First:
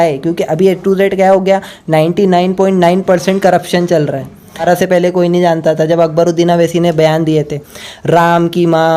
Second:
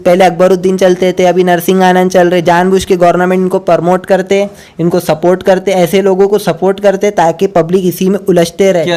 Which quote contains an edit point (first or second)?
first